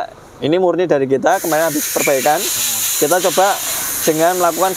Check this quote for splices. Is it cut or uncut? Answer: uncut